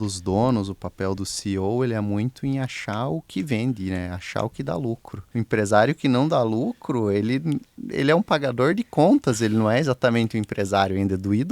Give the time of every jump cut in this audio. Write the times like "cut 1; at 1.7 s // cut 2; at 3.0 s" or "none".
cut 1; at 1.2 s // cut 2; at 5.2 s

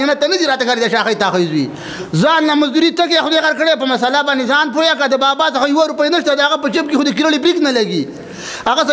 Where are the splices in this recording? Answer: none

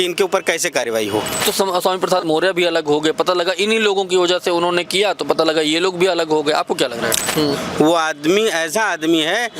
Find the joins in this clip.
cut 1; at 1.4 s // cut 2; at 7.3 s

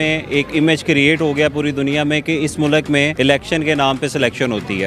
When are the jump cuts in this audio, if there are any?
cut 1; at 3.1 s

